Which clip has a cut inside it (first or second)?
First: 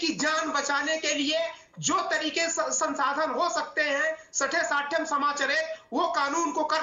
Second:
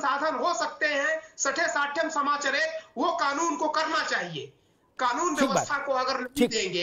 second